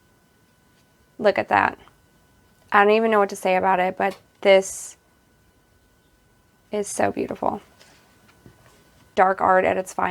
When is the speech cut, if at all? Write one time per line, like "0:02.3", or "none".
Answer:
0:09.1